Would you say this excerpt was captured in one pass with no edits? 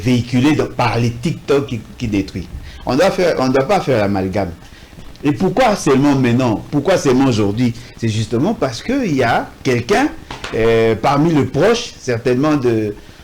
no; 1 cut; at 4.9 s

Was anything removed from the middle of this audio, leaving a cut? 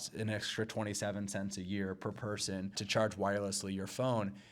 yes; 1 cut; at 2.8 s

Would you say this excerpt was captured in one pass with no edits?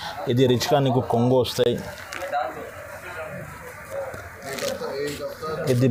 yes; 0 cuts

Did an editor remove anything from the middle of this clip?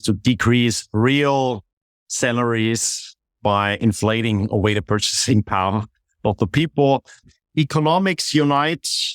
yes; 1 cut; at 7.1 s

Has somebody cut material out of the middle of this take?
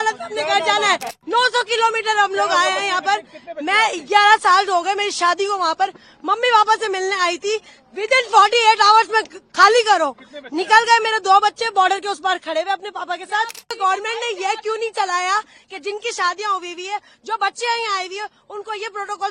yes; 2 cuts; at 1.2 s, 13.8 s

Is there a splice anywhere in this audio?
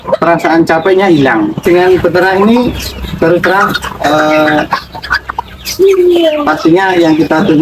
yes; 1 cut; at 1.6 s

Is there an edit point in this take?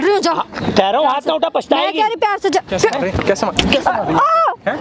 no; 0 cuts

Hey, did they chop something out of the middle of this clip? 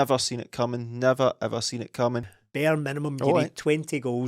yes; 1 cut; at 2.4 s

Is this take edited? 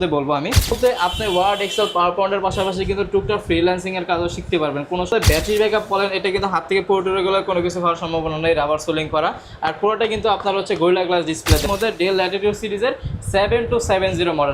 yes; 3 cuts; at 0.8 s, 5.1 s, 11.6 s

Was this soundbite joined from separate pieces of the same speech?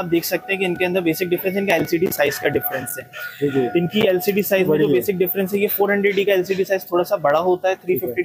no; 0 cuts

